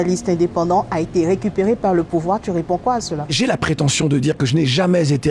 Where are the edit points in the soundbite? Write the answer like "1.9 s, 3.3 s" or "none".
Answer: 3.2 s